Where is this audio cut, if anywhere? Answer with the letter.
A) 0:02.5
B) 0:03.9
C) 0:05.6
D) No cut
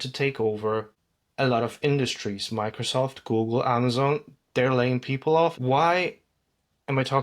C